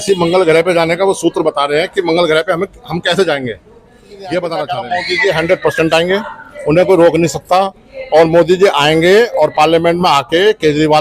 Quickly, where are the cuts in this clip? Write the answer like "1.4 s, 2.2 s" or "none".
4.8 s